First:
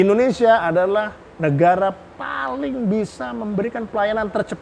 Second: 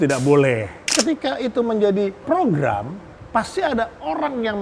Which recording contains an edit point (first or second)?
second